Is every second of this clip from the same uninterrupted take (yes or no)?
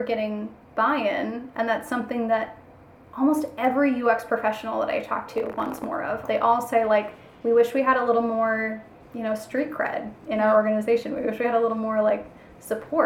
no